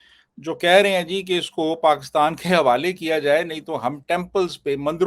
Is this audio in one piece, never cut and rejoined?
yes; 0 cuts

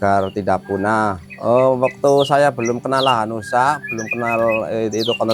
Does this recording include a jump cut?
yes; 1 cut; at 1.2 s

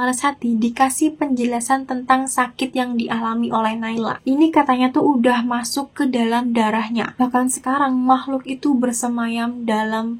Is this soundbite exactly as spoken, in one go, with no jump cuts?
yes; 0 cuts

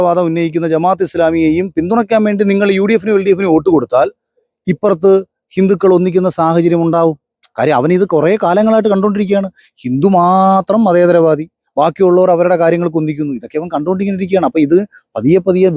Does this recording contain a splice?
no; 0 cuts

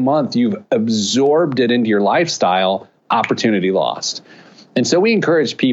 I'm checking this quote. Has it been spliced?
no; 0 cuts

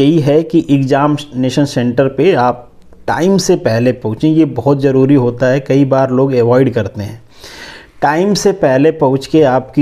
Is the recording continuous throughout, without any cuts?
yes; 0 cuts

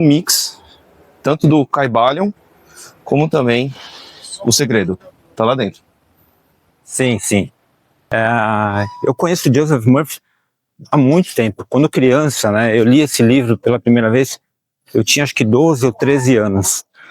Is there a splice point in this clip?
yes; 1 cut; at 8.1 s

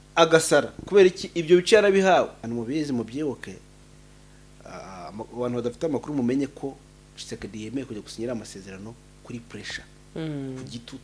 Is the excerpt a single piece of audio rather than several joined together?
no; 1 cut; at 2.5 s

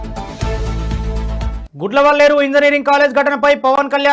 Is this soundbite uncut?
yes; 0 cuts

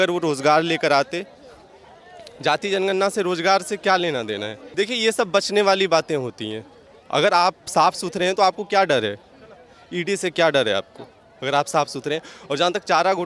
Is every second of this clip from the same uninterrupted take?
no; 1 cut; at 4.6 s

